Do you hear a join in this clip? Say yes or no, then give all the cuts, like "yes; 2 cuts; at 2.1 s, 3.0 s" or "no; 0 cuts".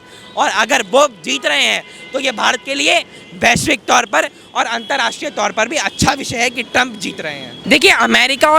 yes; 1 cut; at 7.5 s